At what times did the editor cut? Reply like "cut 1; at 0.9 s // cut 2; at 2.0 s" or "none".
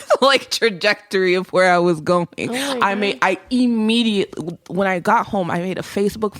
none